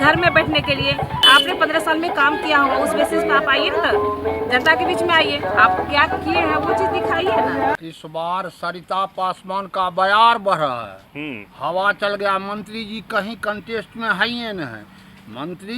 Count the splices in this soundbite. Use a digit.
2